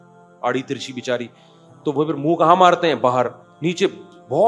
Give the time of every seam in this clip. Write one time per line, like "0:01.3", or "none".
0:03.4